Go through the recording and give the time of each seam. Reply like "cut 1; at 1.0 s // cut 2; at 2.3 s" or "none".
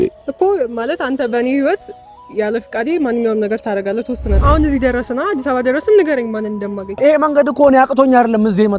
cut 1; at 4.3 s // cut 2; at 6.9 s